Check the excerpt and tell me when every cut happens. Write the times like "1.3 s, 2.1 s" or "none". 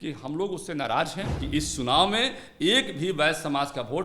1.3 s